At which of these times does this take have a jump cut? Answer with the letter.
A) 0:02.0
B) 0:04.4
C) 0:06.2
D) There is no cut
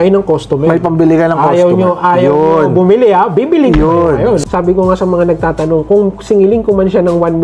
B